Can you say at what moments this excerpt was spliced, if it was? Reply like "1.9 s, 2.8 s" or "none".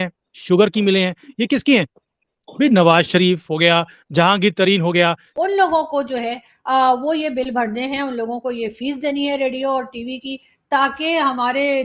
5.2 s